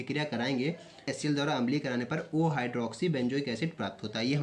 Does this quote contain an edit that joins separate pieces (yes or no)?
yes